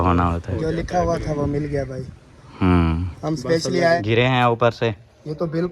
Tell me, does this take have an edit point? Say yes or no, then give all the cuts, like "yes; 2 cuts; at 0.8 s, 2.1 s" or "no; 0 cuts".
yes; 1 cut; at 4.0 s